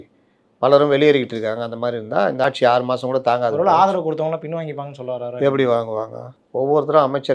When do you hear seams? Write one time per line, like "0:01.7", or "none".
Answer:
0:02.4